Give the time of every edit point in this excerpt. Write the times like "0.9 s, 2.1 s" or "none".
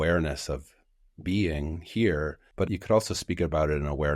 2.7 s